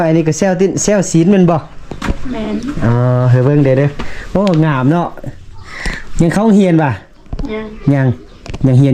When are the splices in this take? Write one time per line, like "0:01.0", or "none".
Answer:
none